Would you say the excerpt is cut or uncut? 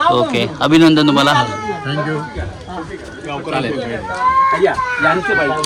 uncut